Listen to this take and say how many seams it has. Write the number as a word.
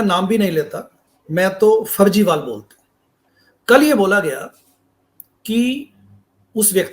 one